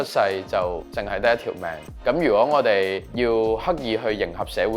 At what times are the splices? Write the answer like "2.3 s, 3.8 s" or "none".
0.9 s, 1.8 s, 3.0 s